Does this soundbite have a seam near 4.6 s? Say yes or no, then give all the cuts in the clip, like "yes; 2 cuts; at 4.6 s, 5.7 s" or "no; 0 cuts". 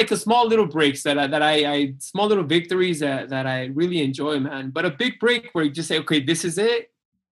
no; 0 cuts